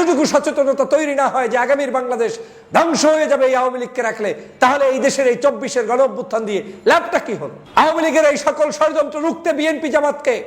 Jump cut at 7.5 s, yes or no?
yes